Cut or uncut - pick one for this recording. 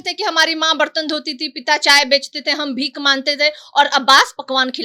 uncut